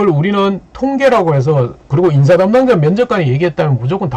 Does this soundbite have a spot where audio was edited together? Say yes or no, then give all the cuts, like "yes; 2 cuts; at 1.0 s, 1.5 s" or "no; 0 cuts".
no; 0 cuts